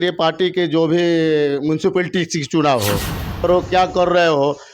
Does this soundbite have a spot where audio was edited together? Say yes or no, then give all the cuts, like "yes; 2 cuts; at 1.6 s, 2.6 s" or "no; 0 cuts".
yes; 1 cut; at 3.5 s